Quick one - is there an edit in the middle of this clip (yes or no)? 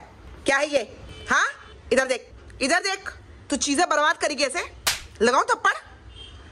no